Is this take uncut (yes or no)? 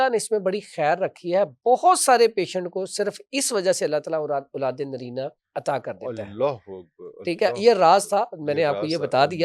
yes